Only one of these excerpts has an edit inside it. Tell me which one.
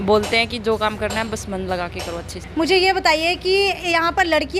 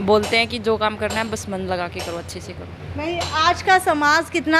first; 1 cut; at 2.4 s

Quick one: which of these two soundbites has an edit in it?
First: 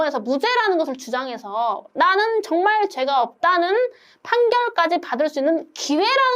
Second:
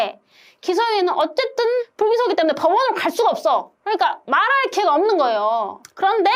second; 2 cuts; at 1.3 s, 3.8 s

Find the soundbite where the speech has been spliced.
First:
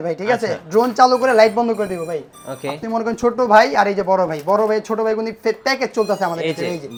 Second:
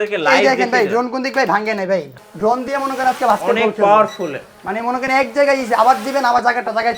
second; 1 cut; at 2.1 s

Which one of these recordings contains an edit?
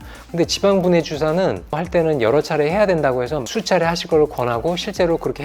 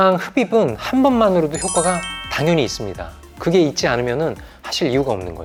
first; 1 cut; at 1.8 s

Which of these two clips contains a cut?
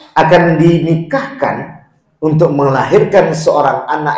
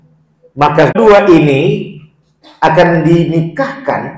second; 1 cut; at 0.9 s

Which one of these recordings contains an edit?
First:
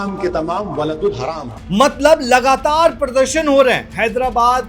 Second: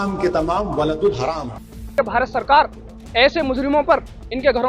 second; 1 cut; at 1.7 s

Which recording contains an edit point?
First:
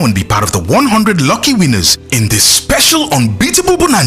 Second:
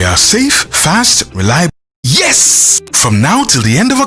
second; 1 cut; at 1.7 s

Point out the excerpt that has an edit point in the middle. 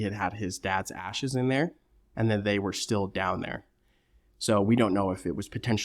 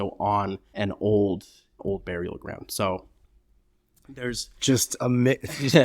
second; 1 cut; at 1.8 s

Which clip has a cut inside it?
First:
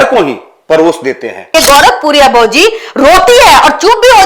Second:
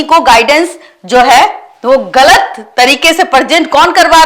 first; 1 cut; at 1.5 s

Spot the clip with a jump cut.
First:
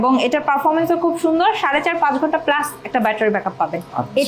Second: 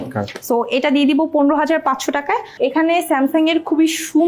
second; 1 cut; at 2.5 s

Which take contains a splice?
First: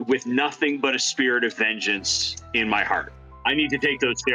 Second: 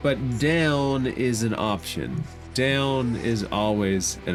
first; 1 cut; at 3.2 s

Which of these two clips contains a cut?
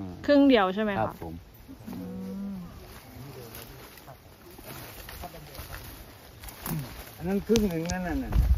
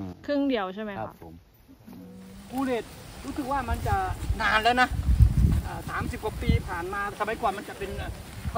second; 2 cuts; at 2.4 s, 7.1 s

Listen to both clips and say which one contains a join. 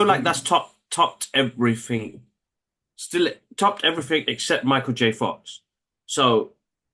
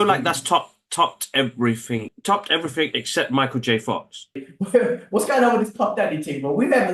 second; 2 cuts; at 2.1 s, 4.5 s

